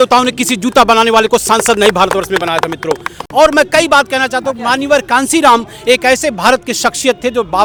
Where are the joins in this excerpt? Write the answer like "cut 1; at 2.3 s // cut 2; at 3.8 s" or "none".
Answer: none